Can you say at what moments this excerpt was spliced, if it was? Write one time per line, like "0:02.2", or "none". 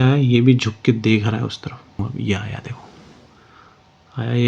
0:02.1